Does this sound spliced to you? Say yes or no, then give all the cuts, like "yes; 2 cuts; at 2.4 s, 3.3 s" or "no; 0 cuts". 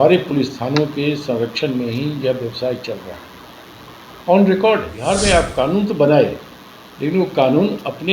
yes; 1 cut; at 4.9 s